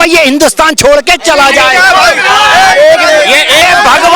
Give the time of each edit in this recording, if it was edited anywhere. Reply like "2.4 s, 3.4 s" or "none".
1.9 s